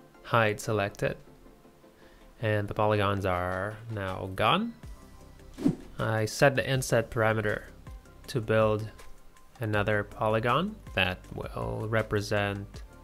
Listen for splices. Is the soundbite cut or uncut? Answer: cut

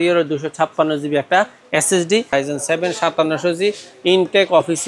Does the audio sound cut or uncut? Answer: cut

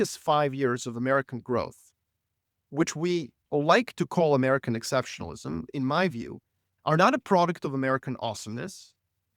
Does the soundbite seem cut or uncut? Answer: cut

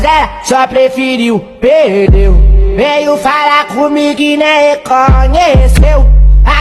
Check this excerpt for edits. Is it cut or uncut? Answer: uncut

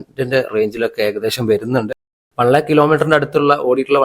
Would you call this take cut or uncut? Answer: cut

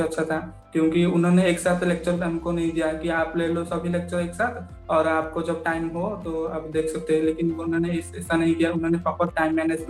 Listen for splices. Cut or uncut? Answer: uncut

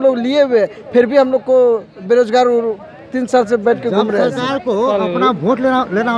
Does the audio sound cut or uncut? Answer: uncut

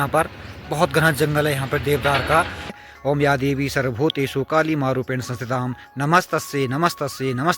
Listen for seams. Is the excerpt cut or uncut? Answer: cut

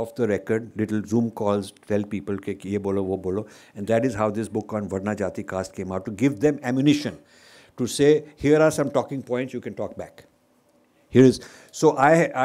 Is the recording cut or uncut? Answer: uncut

